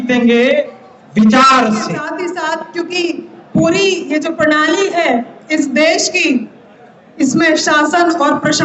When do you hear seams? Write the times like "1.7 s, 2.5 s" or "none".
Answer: 2.1 s